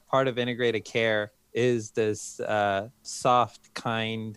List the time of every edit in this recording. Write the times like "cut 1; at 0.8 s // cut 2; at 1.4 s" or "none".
cut 1; at 1.4 s // cut 2; at 3.1 s